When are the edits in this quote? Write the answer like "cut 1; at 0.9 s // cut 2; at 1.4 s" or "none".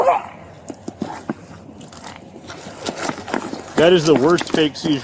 none

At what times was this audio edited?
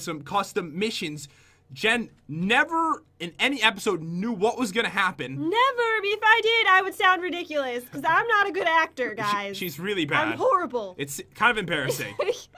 cut 1; at 2.4 s

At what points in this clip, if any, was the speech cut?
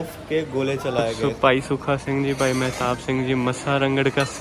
cut 1; at 1.2 s

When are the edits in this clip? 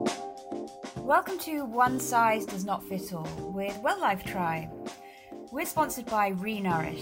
cut 1; at 1.0 s

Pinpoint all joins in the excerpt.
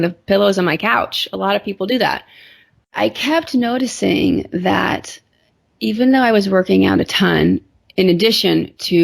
cut 1; at 2.9 s

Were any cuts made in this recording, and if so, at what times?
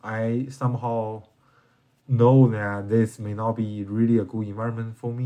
none

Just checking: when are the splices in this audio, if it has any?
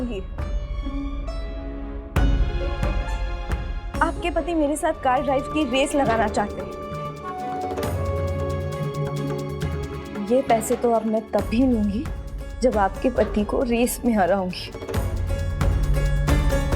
cut 1; at 6.5 s

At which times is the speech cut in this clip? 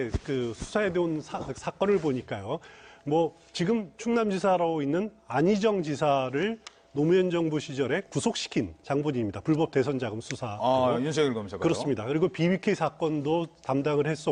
none

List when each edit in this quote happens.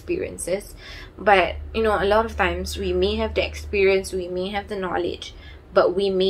none

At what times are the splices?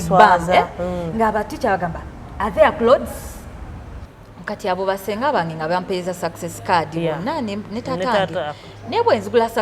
cut 1; at 4.0 s

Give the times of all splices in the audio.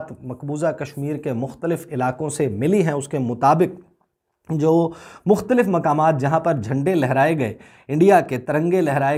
none

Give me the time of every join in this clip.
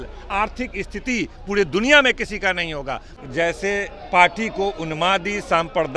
cut 1; at 3.1 s

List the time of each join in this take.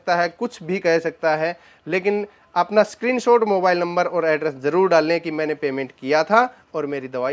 none

